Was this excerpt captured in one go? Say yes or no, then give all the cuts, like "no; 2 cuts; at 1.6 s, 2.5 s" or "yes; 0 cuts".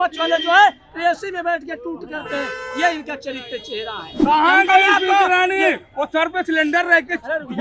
no; 1 cut; at 4.0 s